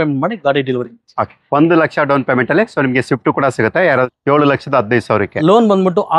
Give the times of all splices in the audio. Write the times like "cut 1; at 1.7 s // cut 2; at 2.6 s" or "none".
cut 1; at 4.1 s